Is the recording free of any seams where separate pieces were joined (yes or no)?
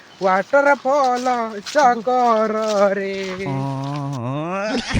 no